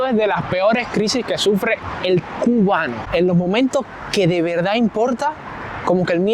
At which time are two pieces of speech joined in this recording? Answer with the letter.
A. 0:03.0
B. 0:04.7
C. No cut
A